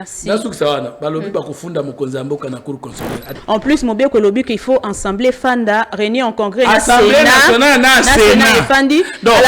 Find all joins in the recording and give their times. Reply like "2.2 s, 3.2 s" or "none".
3.3 s